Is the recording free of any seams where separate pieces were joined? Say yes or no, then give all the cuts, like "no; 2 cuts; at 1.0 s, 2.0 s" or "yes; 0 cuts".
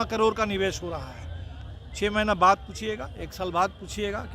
yes; 0 cuts